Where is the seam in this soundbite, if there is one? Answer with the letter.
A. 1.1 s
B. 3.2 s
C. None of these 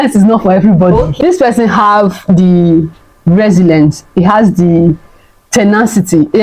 A